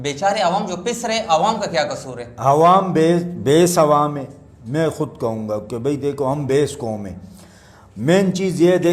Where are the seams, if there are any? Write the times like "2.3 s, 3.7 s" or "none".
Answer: none